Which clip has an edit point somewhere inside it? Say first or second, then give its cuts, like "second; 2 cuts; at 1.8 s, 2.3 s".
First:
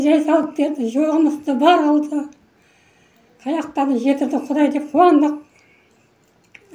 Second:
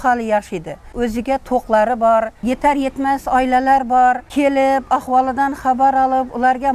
second; 3 cuts; at 0.9 s, 2.4 s, 4.2 s